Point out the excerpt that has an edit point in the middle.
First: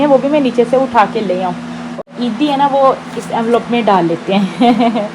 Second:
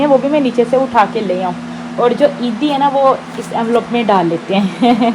first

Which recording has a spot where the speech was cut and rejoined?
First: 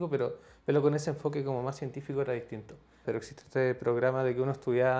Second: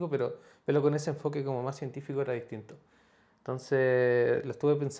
first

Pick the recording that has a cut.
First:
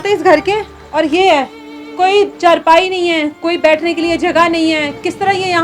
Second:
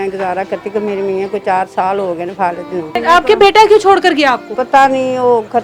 second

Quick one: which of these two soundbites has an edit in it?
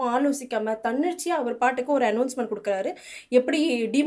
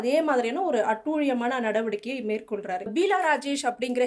second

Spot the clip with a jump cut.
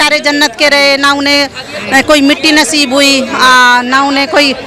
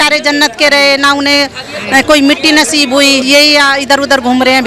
second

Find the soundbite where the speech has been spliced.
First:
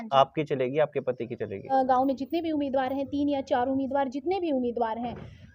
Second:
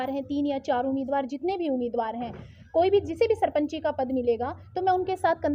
first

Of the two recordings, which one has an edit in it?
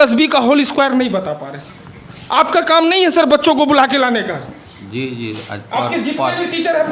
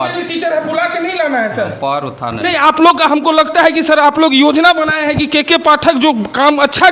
first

